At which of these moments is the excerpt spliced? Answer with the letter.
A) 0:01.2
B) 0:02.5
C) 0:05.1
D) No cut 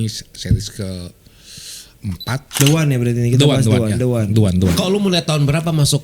B